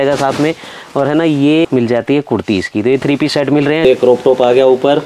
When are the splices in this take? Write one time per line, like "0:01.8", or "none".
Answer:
0:01.6
0:03.8